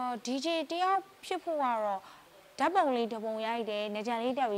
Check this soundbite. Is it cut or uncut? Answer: uncut